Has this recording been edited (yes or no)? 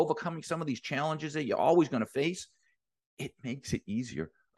no